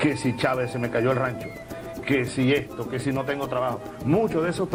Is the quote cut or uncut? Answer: uncut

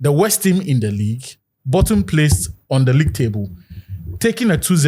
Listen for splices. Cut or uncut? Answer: uncut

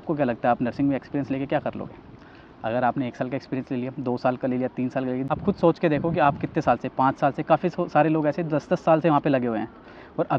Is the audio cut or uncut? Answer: cut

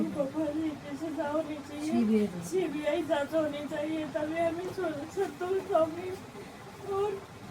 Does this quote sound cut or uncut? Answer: uncut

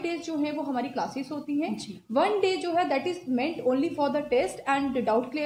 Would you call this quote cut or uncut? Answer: uncut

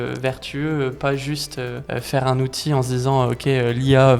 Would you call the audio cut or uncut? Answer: cut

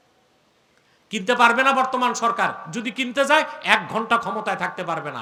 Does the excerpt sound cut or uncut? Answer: uncut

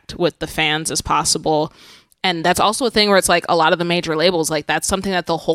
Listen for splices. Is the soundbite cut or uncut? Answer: uncut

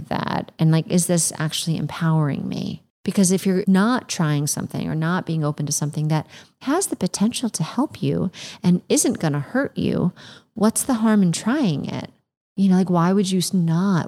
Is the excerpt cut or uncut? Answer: cut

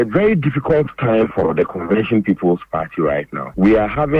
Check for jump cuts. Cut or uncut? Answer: uncut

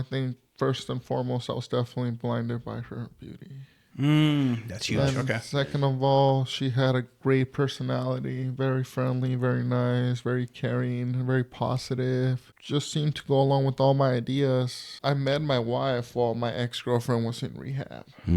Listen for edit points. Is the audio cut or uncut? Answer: cut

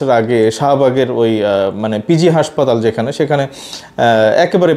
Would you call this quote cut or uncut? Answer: uncut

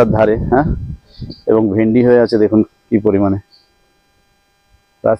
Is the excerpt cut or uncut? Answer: uncut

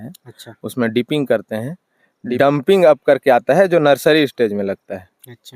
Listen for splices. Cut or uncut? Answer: cut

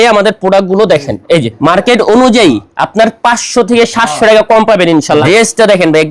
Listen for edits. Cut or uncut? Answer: cut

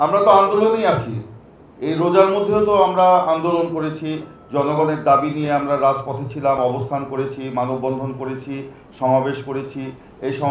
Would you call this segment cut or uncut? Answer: uncut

